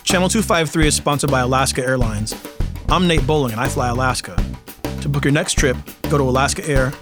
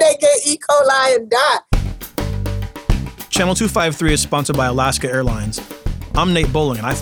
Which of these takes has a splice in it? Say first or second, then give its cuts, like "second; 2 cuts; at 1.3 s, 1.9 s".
second; 1 cut; at 1.7 s